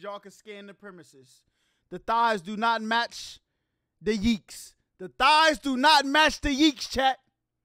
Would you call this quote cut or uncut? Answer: uncut